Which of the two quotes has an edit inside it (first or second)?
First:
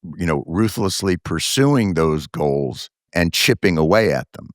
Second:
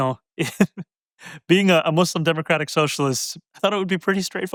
first